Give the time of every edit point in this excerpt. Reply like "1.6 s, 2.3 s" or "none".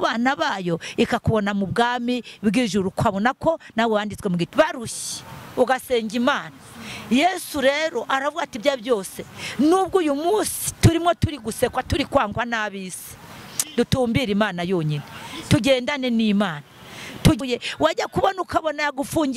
4.5 s, 17.4 s